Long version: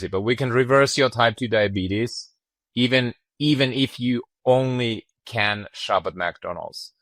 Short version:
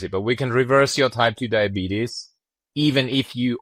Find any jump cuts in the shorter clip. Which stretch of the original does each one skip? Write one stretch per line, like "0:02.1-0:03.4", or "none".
0:02.6-0:03.2